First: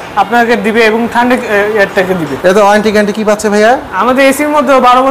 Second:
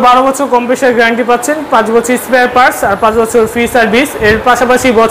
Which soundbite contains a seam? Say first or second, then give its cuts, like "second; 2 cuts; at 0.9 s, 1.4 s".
first; 1 cut; at 2.3 s